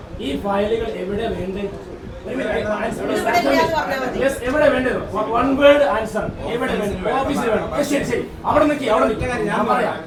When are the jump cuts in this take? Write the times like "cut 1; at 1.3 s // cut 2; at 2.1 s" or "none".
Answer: none

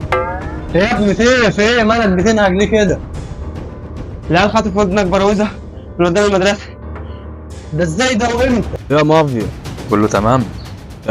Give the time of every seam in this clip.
cut 1; at 8.8 s

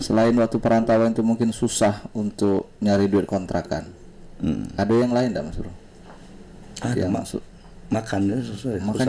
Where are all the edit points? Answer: none

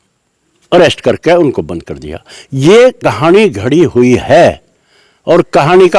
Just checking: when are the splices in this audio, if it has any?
none

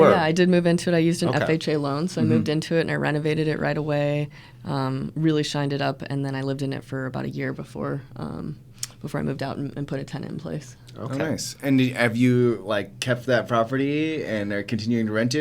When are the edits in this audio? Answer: none

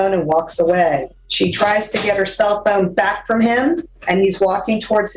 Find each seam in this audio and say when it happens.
cut 1; at 1.2 s // cut 2; at 3.9 s

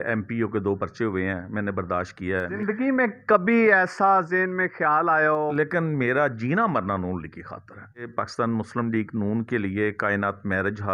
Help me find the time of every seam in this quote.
cut 1; at 2.5 s // cut 2; at 5.5 s // cut 3; at 8.1 s

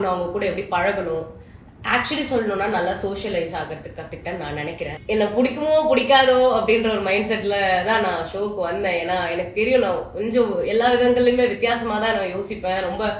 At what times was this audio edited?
cut 1; at 4.9 s

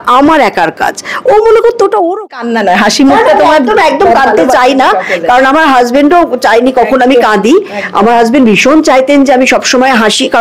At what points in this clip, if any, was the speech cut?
cut 1; at 2.3 s

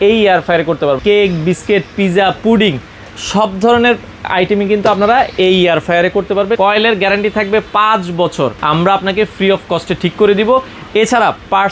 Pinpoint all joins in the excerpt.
cut 1; at 1.0 s // cut 2; at 6.6 s // cut 3; at 8.6 s

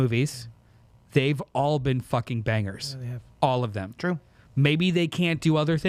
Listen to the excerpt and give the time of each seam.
none

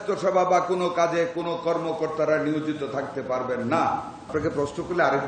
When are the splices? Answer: cut 1; at 4.3 s

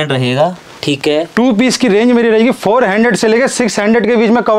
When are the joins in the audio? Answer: none

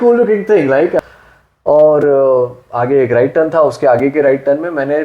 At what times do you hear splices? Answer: cut 1; at 1.0 s

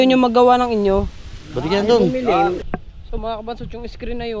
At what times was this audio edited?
cut 1; at 2.7 s

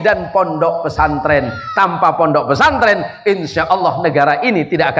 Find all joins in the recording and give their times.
none

